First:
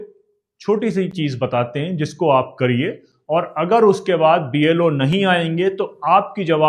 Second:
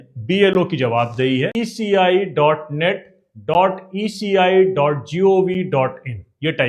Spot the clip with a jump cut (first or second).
second